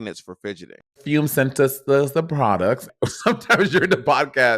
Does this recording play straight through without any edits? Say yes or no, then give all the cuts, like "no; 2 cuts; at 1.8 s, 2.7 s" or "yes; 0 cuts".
no; 2 cuts; at 1.0 s, 2.9 s